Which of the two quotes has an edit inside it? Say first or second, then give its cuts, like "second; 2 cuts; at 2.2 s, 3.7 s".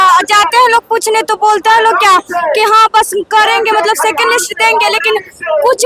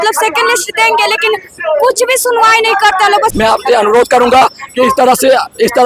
second; 1 cut; at 3.3 s